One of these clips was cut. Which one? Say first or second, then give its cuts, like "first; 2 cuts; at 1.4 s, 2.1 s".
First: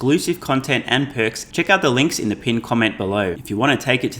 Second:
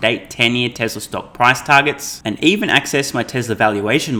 first; 2 cuts; at 1.4 s, 3.4 s